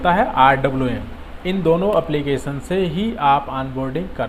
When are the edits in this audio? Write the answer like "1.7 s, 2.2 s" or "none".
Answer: none